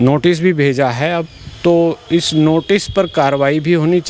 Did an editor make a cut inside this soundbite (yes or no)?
no